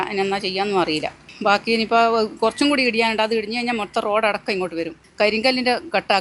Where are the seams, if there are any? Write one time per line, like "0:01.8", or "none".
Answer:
0:05.0